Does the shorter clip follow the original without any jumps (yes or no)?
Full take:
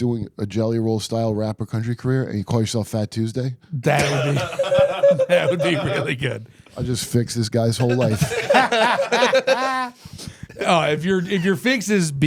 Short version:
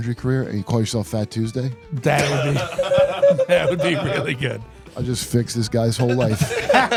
yes